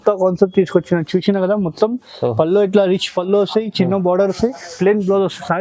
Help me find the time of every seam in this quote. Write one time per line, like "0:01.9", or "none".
none